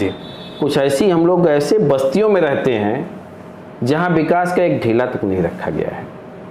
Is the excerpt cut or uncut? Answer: uncut